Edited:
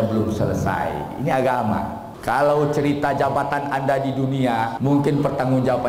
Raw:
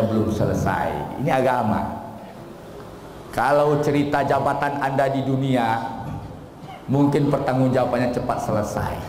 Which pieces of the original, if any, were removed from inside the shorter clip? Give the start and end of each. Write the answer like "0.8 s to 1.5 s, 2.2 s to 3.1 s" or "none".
2.1 s to 3.2 s, 5.8 s to 6.8 s